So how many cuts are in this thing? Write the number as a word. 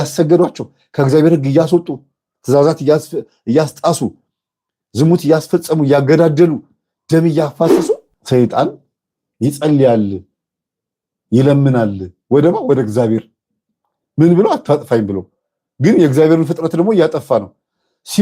one